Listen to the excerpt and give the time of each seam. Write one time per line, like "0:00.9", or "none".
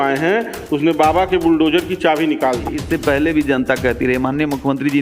0:02.8